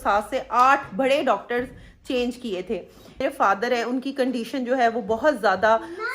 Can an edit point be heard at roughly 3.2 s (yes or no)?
yes